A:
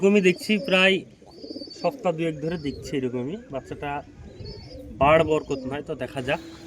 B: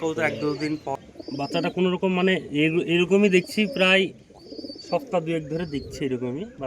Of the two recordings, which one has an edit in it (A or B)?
B